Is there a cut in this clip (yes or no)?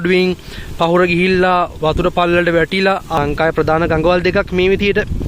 yes